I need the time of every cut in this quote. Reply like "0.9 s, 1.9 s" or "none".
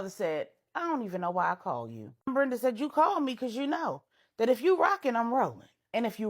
2.3 s

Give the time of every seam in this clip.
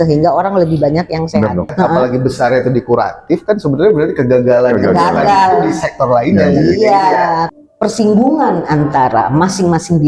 1.7 s, 7.5 s

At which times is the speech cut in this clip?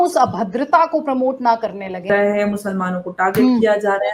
2.1 s

